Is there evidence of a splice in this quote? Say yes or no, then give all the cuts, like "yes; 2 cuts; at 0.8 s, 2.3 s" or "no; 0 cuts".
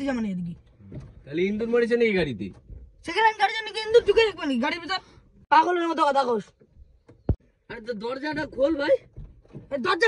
no; 0 cuts